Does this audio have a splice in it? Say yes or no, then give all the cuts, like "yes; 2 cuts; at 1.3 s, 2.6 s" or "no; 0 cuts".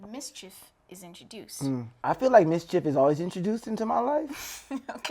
yes; 1 cut; at 1.9 s